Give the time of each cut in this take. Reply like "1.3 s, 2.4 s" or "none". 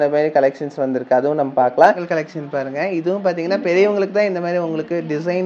1.9 s